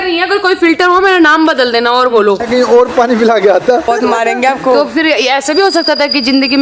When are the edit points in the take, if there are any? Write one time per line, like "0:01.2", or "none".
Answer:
0:02.4
0:03.9